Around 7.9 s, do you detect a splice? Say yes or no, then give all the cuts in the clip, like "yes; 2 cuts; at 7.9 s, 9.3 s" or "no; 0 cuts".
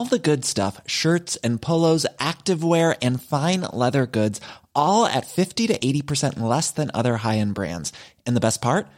no; 0 cuts